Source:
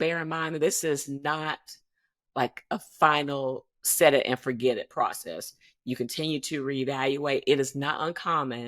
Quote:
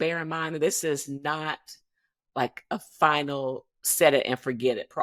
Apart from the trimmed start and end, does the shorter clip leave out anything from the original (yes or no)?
no